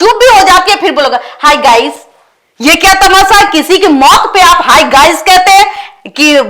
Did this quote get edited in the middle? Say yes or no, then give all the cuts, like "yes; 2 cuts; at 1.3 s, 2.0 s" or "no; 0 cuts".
no; 0 cuts